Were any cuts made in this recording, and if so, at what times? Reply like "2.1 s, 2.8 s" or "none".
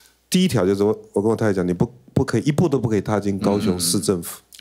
none

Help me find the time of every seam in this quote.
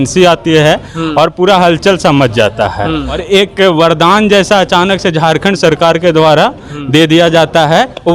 3.2 s

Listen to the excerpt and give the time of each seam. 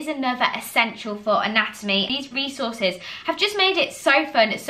2.1 s

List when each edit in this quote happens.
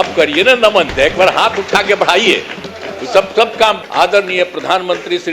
0.9 s, 3.8 s

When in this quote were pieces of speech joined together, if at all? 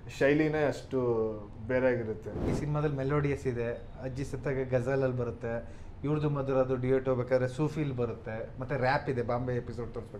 2.6 s

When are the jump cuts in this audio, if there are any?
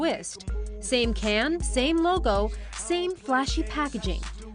none

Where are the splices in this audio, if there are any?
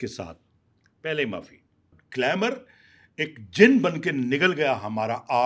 2.0 s

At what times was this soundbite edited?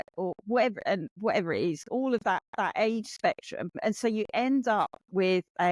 1.1 s, 3.8 s

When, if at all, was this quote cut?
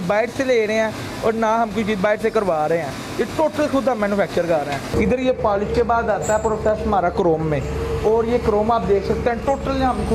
none

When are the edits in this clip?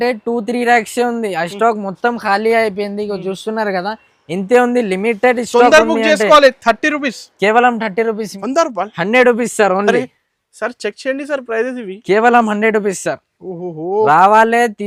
8.3 s

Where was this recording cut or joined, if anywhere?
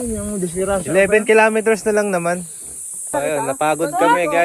3.1 s

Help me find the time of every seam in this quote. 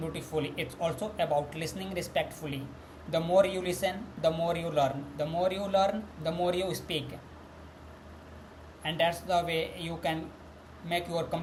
none

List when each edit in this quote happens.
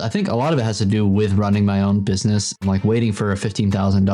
2.6 s

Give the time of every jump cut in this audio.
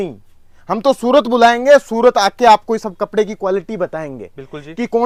none

